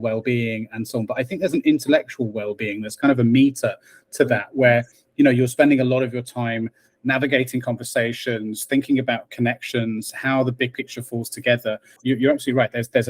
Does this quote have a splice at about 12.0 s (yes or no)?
yes